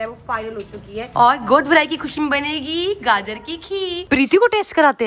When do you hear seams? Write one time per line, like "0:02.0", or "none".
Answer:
0:01.1
0:04.0